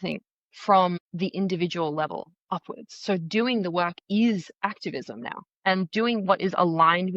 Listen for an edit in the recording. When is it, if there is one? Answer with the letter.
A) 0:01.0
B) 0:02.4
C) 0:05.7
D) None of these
A